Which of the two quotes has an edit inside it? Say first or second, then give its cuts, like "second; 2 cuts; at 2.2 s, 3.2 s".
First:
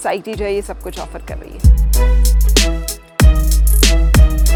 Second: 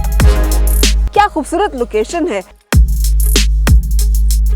second; 2 cuts; at 1.0 s, 2.6 s